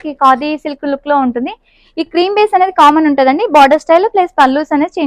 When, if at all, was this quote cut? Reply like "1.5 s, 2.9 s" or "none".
none